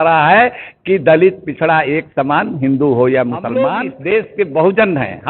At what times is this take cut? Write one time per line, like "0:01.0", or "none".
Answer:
0:03.5